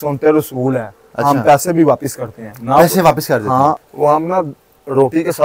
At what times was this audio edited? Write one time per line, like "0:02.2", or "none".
0:03.8